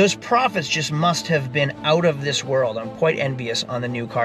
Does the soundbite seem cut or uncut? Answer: uncut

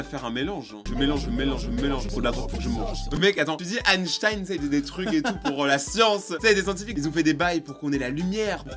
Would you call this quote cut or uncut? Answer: uncut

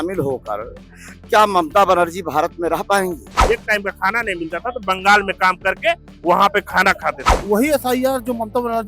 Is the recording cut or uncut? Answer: cut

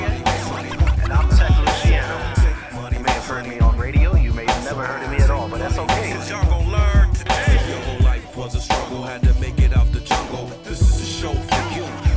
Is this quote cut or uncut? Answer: uncut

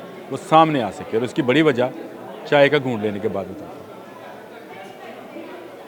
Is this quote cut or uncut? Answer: uncut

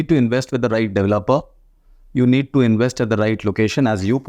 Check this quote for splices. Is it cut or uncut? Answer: uncut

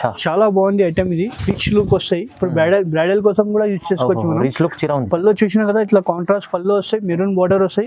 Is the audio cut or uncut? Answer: uncut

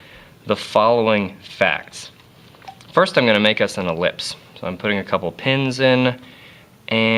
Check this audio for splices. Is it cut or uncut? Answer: uncut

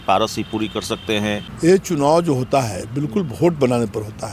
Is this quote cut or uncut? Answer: cut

